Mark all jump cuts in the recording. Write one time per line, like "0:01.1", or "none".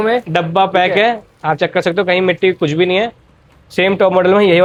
none